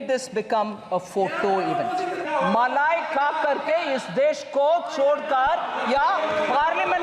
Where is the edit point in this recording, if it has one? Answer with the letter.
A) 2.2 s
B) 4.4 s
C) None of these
A